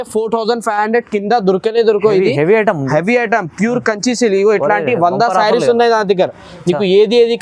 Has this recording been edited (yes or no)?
no